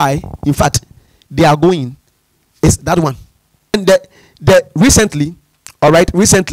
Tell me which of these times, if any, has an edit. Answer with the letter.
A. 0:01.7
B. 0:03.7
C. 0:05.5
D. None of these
B